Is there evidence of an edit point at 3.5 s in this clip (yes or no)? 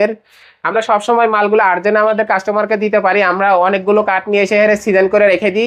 no